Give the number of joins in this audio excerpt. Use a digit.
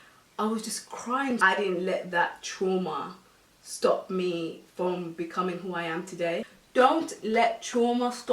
2